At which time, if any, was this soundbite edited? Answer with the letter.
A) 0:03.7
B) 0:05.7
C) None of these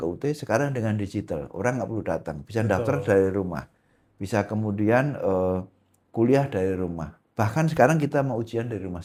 C